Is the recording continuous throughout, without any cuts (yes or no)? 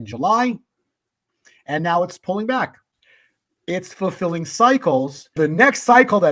no